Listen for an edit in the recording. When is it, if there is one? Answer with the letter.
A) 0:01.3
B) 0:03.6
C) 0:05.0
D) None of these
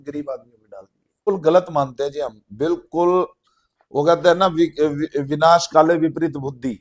A